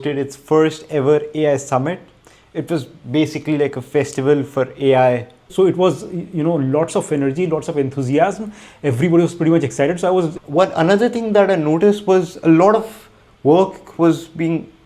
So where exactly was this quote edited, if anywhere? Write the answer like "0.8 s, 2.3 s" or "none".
5.5 s, 10.4 s